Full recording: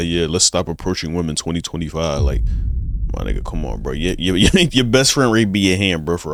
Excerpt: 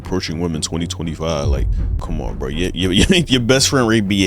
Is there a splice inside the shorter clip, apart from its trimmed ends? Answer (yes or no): yes